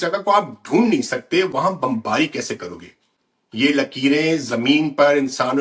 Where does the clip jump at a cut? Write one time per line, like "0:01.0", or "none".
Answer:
none